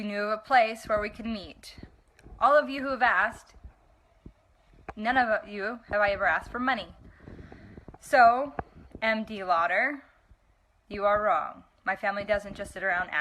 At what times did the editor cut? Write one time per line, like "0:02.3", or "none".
0:09.4